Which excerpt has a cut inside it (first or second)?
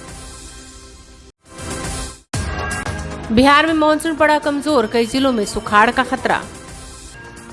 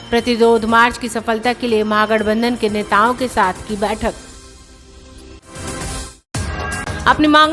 first